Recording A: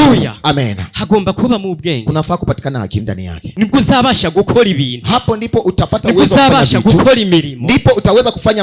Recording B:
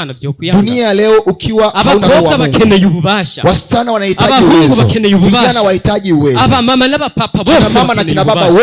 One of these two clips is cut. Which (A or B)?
A